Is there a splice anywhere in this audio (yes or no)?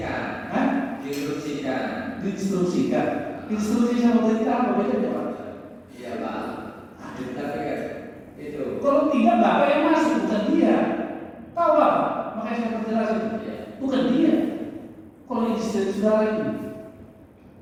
no